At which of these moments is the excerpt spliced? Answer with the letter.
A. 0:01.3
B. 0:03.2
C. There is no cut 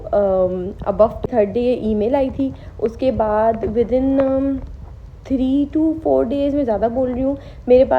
A